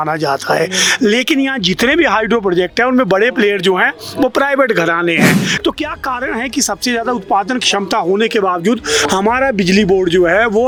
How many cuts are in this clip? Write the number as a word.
zero